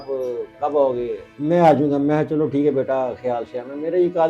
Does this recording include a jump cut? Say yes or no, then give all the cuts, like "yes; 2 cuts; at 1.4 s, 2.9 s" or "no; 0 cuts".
yes; 1 cut; at 1.2 s